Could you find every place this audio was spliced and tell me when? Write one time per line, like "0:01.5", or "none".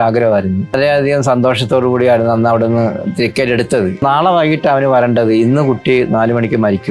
0:00.7
0:04.0